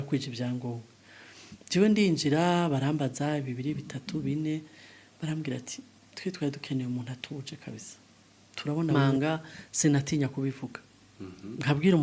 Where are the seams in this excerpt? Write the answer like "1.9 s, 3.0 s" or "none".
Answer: 8.9 s